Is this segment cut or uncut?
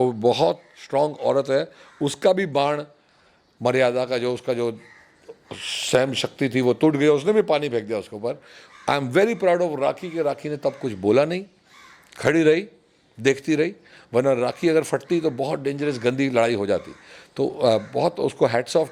uncut